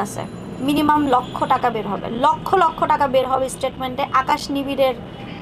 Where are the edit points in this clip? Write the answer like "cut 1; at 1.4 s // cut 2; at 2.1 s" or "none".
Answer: none